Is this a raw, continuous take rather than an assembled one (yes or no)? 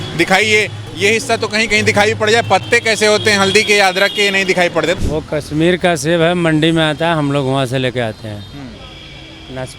no